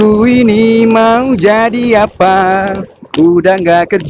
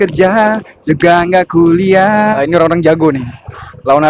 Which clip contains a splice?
second; 1 cut; at 2.4 s

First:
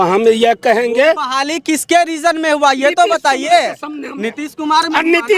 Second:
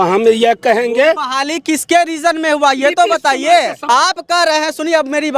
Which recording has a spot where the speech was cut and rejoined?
second; 1 cut; at 3.8 s

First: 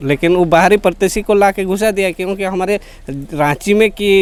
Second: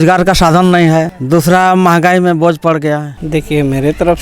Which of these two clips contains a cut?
second; 2 cuts; at 1.2 s, 3.1 s

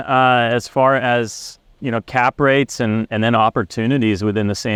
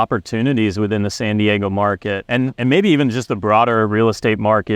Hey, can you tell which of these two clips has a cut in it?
second; 1 cut; at 2.2 s

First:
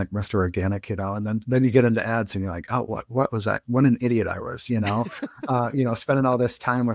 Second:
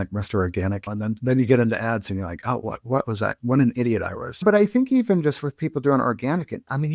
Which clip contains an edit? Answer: second; 2 cuts; at 0.9 s, 4.4 s

